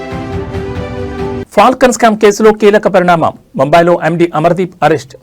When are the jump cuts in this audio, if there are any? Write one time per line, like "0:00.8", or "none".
0:01.1